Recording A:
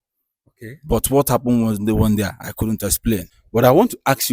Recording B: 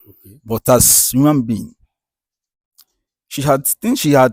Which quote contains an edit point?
A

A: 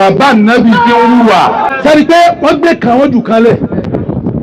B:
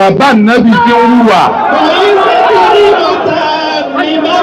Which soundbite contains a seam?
A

